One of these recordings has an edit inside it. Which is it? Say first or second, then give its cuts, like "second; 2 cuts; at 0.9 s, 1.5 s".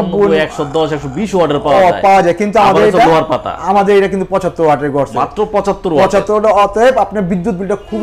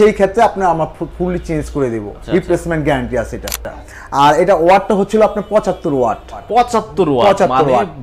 second; 3 cuts; at 2.2 s, 3.9 s, 6.4 s